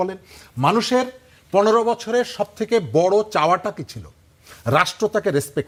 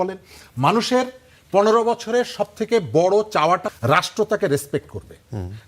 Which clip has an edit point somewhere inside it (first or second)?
second